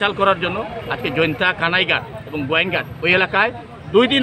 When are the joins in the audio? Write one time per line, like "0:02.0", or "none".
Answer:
none